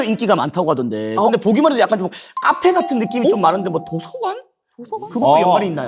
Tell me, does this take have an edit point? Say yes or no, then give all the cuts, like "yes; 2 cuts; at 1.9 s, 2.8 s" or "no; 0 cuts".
no; 0 cuts